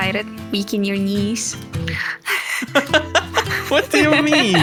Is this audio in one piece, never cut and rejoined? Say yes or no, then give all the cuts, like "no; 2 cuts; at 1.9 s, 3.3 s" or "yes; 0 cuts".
yes; 0 cuts